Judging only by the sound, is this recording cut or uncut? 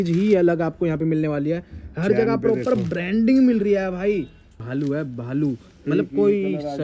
cut